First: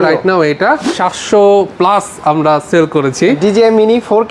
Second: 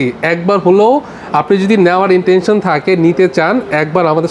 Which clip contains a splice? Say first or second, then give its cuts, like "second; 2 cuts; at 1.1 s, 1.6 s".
first; 1 cut; at 0.9 s